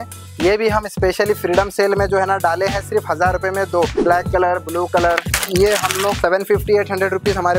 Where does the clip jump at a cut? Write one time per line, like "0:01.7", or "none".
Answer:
0:04.0
0:05.3
0:06.2

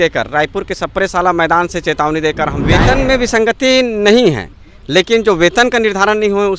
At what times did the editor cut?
0:02.7

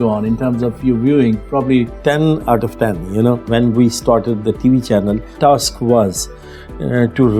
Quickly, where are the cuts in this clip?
0:01.9
0:03.4
0:05.4

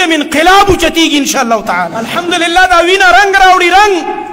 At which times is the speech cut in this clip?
0:02.0

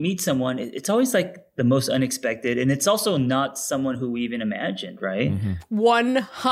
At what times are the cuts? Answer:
0:05.6

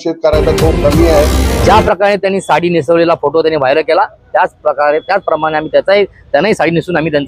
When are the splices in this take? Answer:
0:01.3

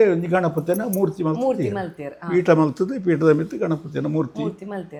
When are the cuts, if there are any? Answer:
none

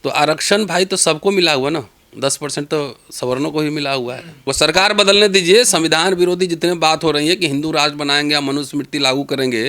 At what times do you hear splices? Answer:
0:04.5

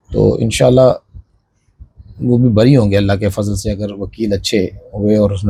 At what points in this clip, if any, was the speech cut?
none

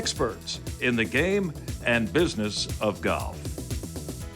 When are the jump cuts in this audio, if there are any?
0:03.4

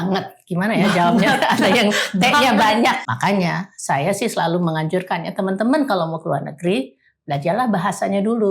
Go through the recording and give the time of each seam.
0:03.0

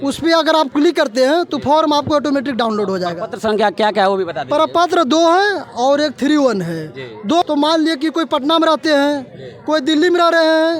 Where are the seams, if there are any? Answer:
0:07.4

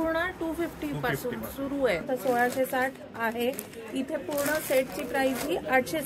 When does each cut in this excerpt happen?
0:02.0

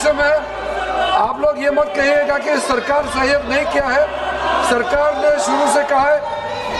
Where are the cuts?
none

